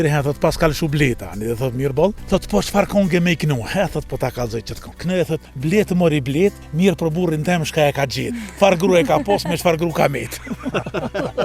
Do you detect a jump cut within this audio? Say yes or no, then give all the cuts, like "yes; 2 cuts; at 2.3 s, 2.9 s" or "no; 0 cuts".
yes; 3 cuts; at 2.2 s, 5.3 s, 6.6 s